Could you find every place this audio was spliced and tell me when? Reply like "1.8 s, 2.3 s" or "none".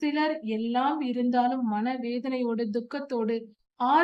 none

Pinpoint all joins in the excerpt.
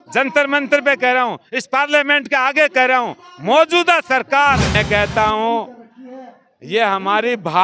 4.7 s

